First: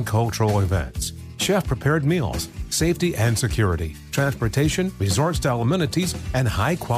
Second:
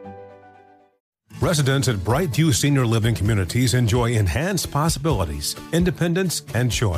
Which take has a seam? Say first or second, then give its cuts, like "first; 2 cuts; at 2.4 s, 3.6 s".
second; 1 cut; at 1.1 s